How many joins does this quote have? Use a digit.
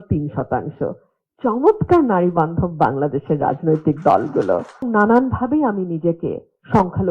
1